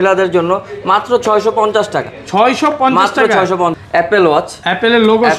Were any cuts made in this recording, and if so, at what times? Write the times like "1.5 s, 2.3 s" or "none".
3.8 s